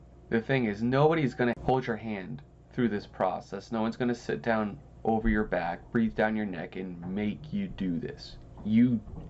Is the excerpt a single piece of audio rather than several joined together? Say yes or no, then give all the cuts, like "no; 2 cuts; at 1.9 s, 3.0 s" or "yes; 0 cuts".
no; 1 cut; at 1.6 s